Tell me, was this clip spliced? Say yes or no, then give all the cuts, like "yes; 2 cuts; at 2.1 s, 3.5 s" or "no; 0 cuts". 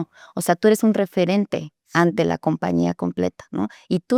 no; 0 cuts